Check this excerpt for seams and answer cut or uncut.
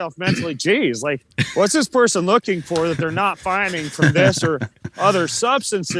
uncut